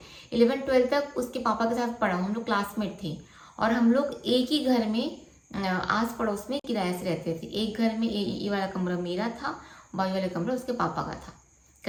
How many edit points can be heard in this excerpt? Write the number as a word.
zero